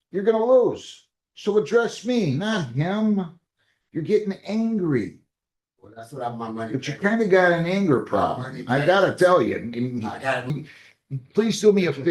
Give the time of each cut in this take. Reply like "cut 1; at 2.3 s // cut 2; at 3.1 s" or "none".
cut 1; at 10.7 s